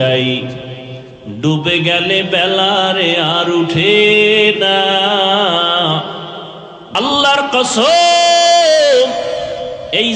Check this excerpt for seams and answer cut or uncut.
cut